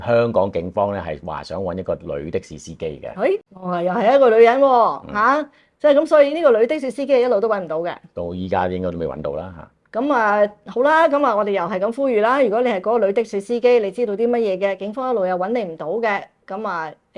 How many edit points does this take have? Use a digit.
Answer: 1